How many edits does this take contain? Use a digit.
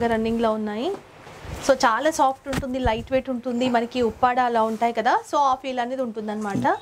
0